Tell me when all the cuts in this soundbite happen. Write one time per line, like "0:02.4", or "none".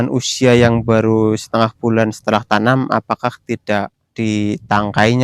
0:04.0